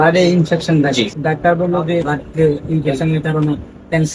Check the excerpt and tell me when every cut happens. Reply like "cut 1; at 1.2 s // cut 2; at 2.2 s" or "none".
cut 1; at 1.1 s // cut 2; at 2.1 s